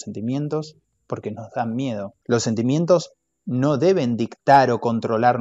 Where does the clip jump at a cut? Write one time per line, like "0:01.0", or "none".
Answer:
0:02.2